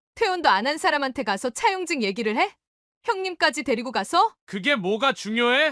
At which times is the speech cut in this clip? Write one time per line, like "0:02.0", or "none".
0:04.4

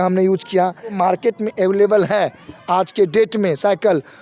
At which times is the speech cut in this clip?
0:00.9

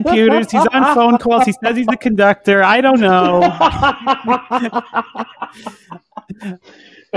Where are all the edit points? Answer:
none

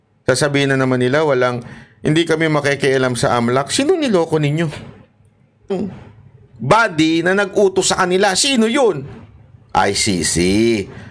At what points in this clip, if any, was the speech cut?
0:05.7

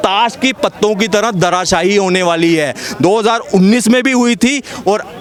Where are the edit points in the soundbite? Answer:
none

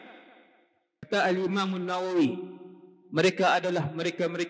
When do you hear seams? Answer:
0:01.1

